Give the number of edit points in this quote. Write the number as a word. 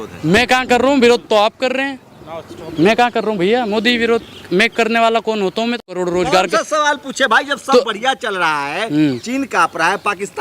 one